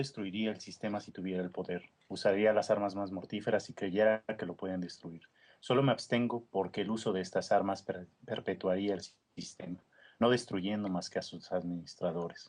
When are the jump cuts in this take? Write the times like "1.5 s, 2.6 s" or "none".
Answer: 10.3 s